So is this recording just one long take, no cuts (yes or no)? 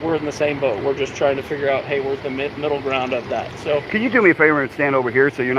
yes